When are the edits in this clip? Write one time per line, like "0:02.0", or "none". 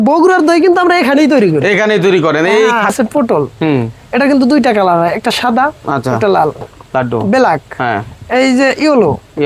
0:02.9
0:06.7